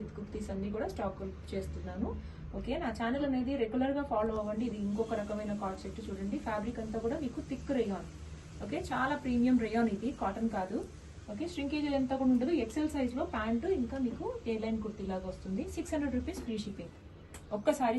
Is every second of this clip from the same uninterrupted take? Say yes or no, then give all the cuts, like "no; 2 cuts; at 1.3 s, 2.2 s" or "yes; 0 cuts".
yes; 0 cuts